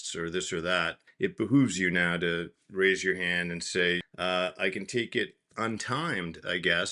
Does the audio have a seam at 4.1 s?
yes; 2 cuts; at 1.0 s, 4.1 s

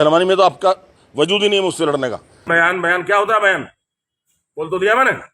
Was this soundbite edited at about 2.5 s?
yes; 1 cut; at 2.5 s

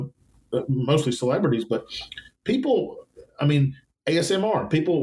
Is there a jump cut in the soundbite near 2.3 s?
no; 1 cut; at 3.9 s

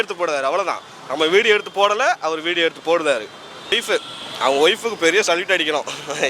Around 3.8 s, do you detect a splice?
yes; 1 cut; at 3.8 s

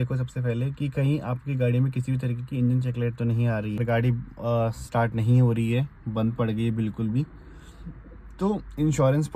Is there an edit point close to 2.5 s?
no; 1 cut; at 3.8 s

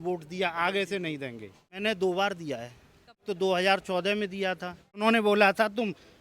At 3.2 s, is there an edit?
yes; 3 cuts; at 1.8 s, 3.2 s, 5.0 s

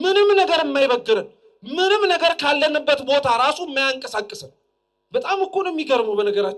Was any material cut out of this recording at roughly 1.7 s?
no; 0 cuts

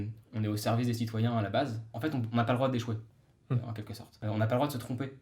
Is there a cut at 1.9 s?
yes; 2 cuts; at 1.9 s, 4.2 s

